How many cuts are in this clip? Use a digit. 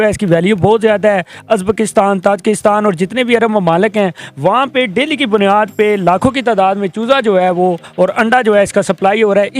0